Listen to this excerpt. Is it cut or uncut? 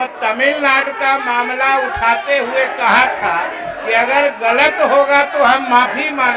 uncut